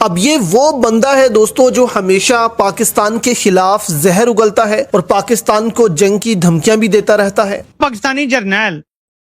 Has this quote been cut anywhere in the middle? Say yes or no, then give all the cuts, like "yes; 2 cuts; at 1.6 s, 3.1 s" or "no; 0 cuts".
yes; 1 cut; at 7.7 s